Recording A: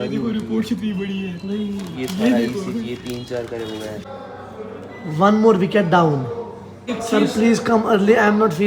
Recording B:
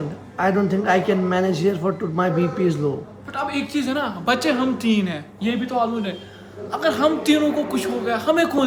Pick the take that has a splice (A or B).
A